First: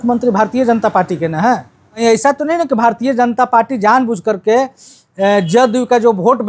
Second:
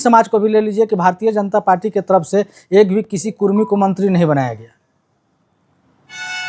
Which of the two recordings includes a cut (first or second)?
first